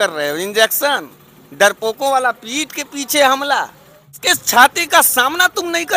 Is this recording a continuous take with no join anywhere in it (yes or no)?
no